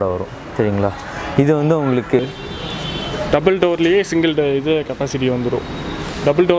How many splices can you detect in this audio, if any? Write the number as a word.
one